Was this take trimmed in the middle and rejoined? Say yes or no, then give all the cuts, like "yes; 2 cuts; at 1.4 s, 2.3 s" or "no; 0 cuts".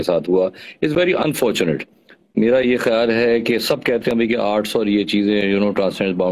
no; 0 cuts